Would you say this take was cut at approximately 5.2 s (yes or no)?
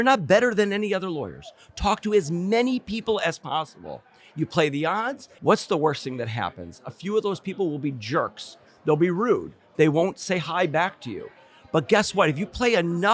yes